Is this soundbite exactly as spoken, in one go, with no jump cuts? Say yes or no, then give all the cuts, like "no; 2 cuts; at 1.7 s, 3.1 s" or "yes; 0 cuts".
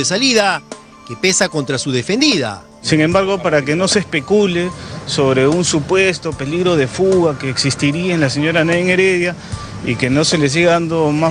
no; 1 cut; at 2.6 s